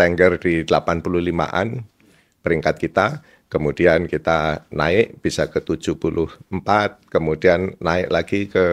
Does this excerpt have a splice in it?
no; 0 cuts

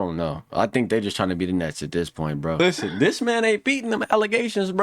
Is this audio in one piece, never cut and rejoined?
no; 1 cut; at 2.6 s

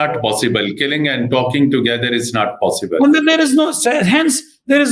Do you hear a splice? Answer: no; 0 cuts

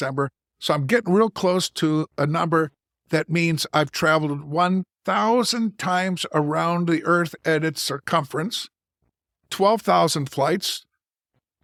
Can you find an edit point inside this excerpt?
no; 0 cuts

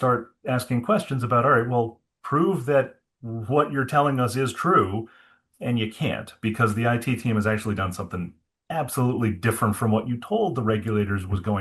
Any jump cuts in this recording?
no; 0 cuts

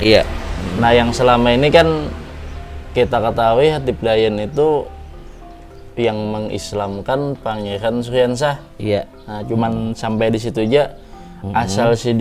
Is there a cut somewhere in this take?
no; 0 cuts

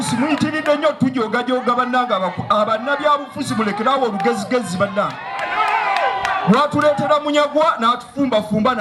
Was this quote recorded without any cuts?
yes; 0 cuts

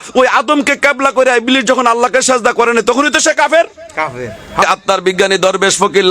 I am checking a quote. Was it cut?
yes; 1 cut; at 4.6 s

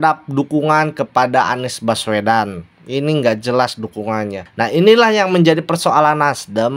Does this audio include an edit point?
yes; 1 cut; at 4.4 s

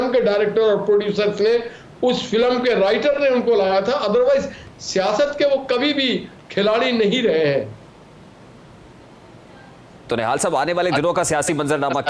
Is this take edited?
no; 0 cuts

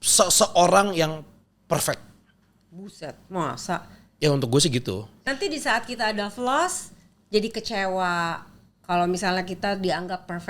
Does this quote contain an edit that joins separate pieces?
yes; 1 cut; at 5.2 s

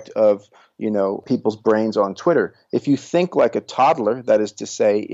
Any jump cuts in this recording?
yes; 1 cut; at 1.2 s

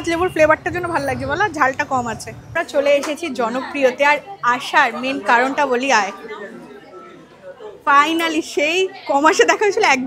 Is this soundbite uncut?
no; 1 cut; at 2.5 s

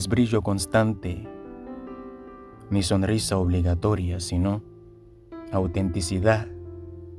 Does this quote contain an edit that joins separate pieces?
yes; 2 cuts; at 0.9 s, 2.6 s

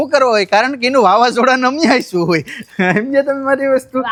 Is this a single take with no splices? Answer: yes; 0 cuts

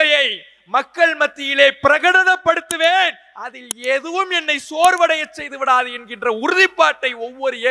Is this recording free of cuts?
yes; 0 cuts

